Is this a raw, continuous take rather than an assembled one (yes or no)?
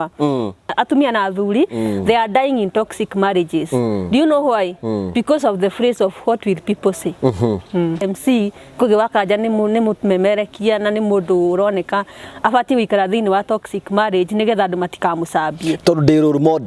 no